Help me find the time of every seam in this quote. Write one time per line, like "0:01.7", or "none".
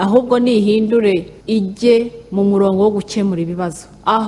0:01.3